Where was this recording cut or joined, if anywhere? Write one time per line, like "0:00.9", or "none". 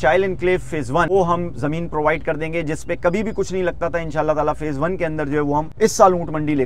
0:01.1
0:05.7